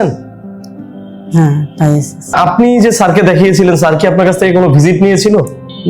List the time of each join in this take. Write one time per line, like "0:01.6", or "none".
0:02.3